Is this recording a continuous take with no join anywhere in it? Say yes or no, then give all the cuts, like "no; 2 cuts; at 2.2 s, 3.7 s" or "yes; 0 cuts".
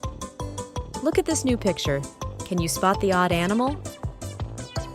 no; 2 cuts; at 1.0 s, 3.8 s